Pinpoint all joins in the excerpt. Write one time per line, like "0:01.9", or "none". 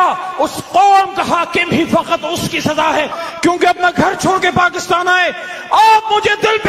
0:03.2